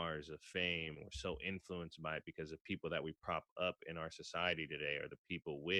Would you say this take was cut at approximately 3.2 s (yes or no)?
no